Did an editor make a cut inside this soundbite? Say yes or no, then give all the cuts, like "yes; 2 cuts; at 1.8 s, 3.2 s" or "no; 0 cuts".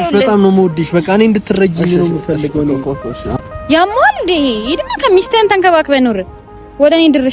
yes; 1 cut; at 3.3 s